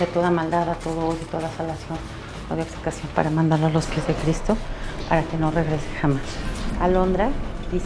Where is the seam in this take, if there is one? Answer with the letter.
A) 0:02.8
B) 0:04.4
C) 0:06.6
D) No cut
C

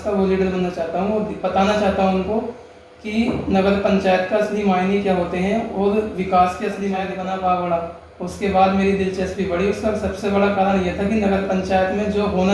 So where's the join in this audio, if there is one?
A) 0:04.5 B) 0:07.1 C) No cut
B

